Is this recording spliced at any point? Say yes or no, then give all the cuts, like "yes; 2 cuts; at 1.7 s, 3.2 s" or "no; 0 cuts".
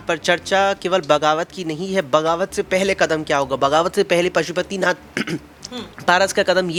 no; 0 cuts